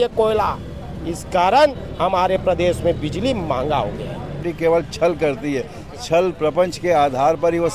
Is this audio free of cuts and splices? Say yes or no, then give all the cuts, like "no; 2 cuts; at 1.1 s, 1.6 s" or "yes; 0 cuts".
no; 1 cut; at 4.4 s